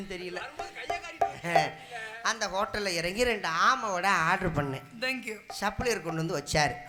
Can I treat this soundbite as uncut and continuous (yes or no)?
yes